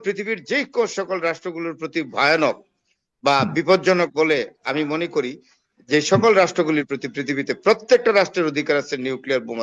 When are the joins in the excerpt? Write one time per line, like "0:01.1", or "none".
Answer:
none

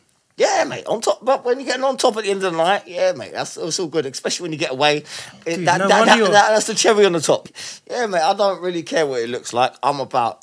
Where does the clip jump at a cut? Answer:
0:07.5

